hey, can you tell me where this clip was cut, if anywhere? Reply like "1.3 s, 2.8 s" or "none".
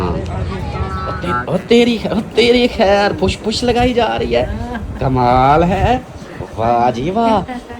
1.1 s